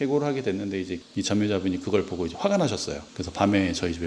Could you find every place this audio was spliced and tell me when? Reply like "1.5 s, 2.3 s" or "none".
1.0 s